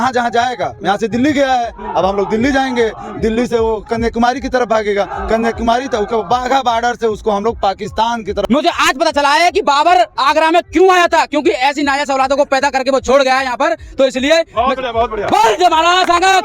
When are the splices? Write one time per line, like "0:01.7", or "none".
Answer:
0:08.4